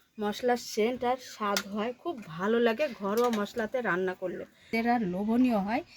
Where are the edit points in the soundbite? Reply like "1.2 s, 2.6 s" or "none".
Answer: 4.7 s

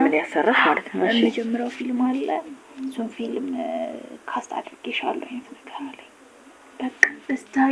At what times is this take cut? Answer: none

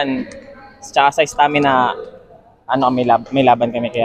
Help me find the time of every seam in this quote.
none

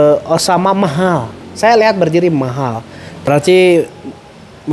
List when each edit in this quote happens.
3.3 s

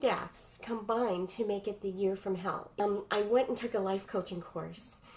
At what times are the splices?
2.8 s

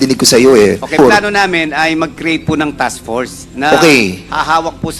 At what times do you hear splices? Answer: 1.0 s

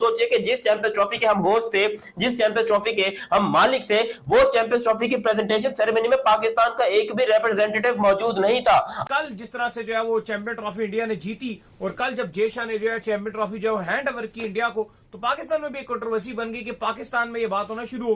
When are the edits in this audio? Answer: none

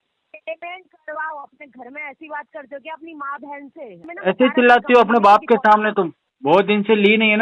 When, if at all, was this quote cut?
4.0 s, 6.2 s

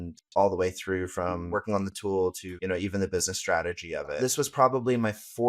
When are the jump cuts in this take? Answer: 1.5 s, 2.5 s, 4.1 s

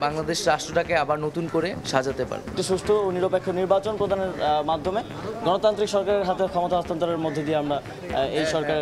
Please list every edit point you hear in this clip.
2.5 s

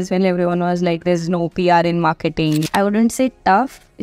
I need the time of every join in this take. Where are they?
2.7 s

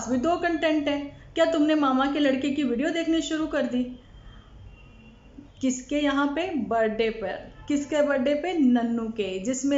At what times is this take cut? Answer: 1.2 s, 4.9 s

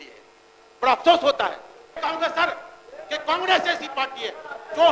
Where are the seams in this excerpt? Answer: 2.0 s

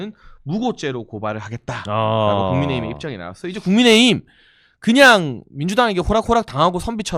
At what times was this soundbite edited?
none

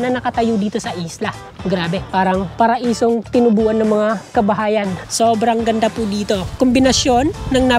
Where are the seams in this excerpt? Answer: 1.4 s, 5.0 s, 6.5 s

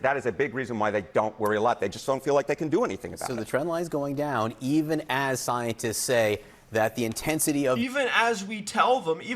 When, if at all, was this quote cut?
none

